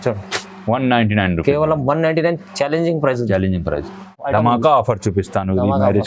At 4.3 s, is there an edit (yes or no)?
yes